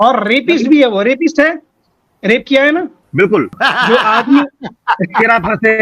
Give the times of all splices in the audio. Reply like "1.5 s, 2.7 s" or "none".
3.5 s